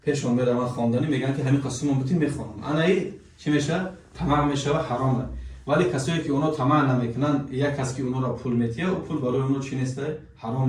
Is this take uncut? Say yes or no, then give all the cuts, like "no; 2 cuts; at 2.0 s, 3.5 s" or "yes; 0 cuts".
yes; 0 cuts